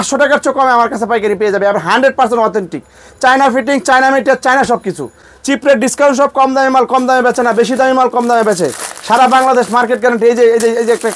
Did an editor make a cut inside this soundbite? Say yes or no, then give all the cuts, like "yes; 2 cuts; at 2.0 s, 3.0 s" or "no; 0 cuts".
no; 0 cuts